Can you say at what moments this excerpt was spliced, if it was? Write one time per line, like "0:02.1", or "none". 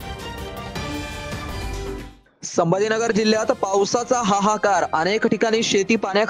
none